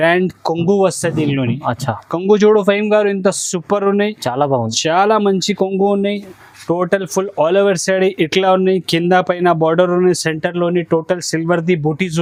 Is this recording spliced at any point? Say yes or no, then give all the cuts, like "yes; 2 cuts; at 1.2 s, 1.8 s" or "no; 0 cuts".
no; 0 cuts